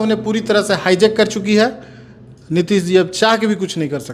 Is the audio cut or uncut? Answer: uncut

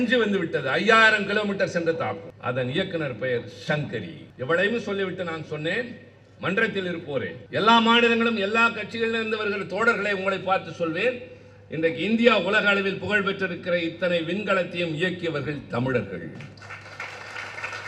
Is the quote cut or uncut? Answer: cut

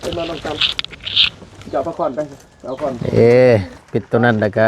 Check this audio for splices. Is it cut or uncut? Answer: cut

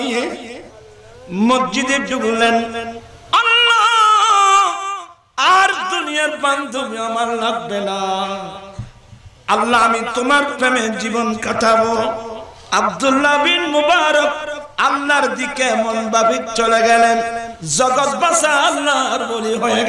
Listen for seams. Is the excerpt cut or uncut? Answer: uncut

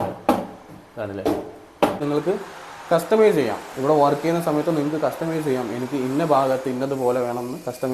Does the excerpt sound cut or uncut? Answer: cut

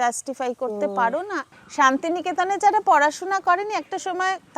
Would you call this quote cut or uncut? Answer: cut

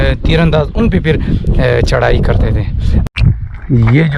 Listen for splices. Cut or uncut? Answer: cut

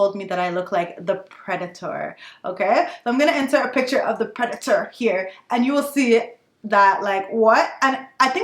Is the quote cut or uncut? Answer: uncut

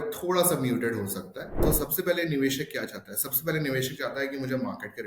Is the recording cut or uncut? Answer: cut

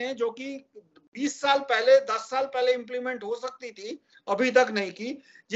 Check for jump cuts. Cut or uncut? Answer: uncut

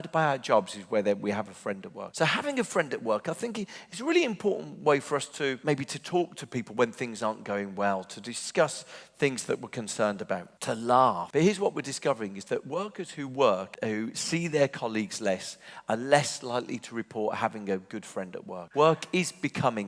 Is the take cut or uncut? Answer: cut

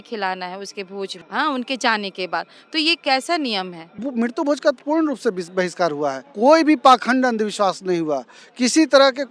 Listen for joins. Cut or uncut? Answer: cut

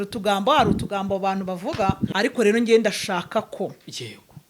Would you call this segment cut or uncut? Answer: cut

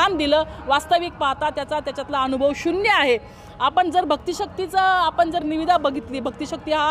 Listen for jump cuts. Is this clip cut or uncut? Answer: uncut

